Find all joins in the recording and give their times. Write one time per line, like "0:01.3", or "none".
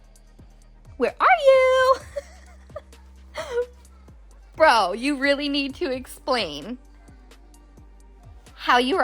0:00.9